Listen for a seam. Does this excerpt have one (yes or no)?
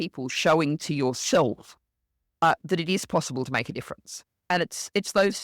yes